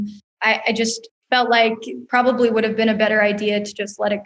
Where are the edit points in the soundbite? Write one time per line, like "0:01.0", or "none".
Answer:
0:02.0

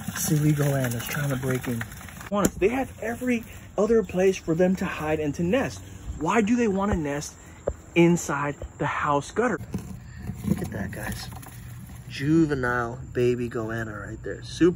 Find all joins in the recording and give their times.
0:02.3
0:09.6

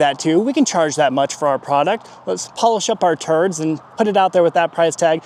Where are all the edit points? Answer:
none

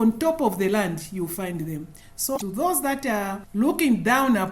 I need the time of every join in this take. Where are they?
0:02.4
0:03.4

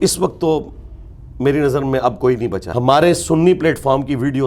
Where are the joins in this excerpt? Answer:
0:02.6

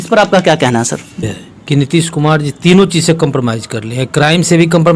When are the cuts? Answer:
0:01.3

